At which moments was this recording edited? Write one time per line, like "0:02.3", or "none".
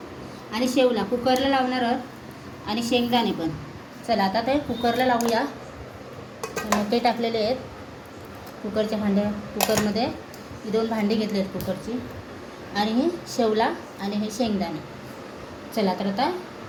none